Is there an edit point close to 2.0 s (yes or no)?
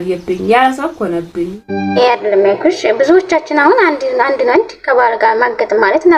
yes